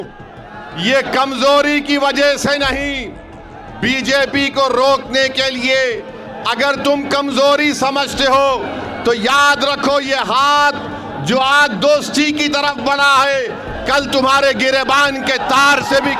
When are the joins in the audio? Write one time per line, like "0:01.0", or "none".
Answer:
none